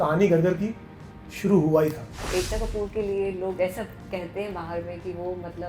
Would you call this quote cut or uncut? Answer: cut